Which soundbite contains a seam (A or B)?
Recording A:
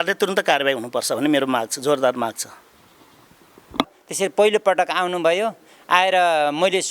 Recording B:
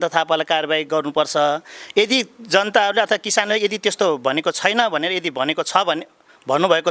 A